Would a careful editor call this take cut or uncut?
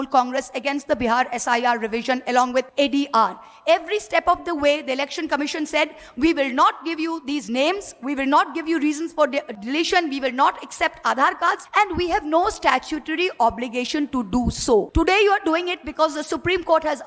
cut